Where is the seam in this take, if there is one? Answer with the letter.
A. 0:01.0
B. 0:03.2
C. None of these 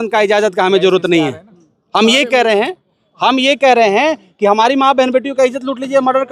C